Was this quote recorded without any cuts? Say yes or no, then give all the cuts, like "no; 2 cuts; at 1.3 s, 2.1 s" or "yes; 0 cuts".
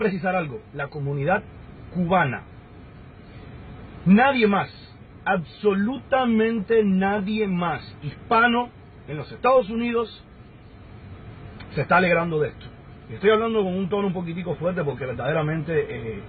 no; 1 cut; at 6.0 s